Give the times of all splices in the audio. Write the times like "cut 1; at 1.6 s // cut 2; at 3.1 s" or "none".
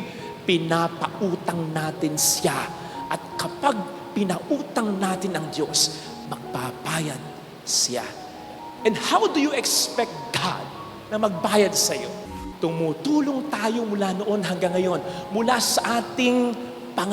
cut 1; at 12.4 s